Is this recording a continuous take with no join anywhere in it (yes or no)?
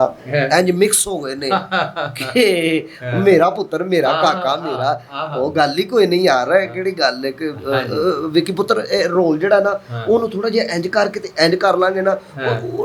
yes